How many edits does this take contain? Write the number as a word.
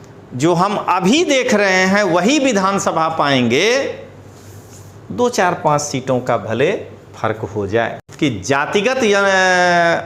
one